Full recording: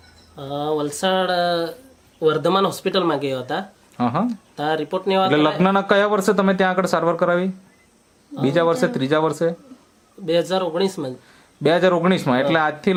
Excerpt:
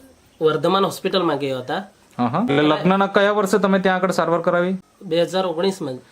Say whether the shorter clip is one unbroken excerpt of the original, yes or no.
no